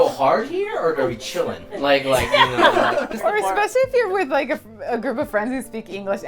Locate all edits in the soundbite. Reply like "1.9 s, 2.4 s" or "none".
3.1 s